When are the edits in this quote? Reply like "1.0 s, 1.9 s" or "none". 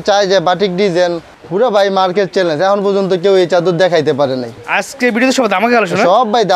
1.3 s, 4.5 s